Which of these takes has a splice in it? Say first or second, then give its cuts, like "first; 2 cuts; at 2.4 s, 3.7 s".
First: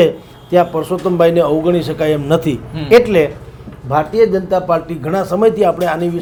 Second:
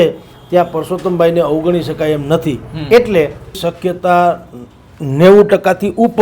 second; 1 cut; at 3.6 s